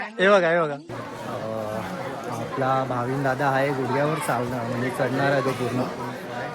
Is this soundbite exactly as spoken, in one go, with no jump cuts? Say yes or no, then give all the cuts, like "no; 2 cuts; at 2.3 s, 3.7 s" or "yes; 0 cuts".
no; 1 cut; at 0.9 s